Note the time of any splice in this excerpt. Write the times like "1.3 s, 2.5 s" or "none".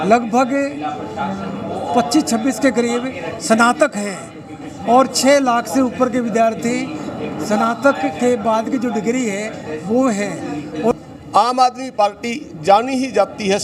10.9 s